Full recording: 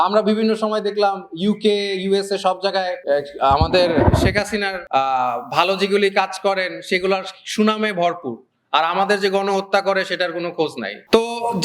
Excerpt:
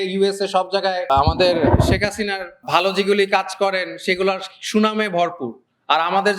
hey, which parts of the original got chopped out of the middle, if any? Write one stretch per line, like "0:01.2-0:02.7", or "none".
0:02.9-0:03.4
0:04.9-0:05.4